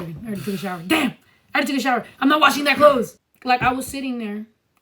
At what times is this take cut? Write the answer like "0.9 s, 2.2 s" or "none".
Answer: 3.3 s